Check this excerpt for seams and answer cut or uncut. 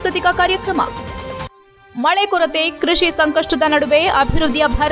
uncut